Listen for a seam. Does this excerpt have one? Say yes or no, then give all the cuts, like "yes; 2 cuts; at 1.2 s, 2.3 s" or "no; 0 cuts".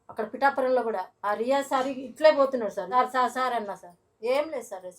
yes; 2 cuts; at 1.1 s, 2.9 s